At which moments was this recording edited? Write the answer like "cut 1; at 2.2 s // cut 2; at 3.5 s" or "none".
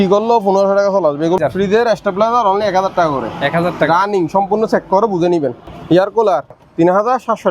cut 1; at 1.4 s // cut 2; at 5.7 s // cut 3; at 6.6 s